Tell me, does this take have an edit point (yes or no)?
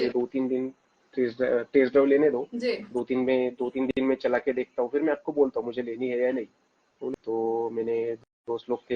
yes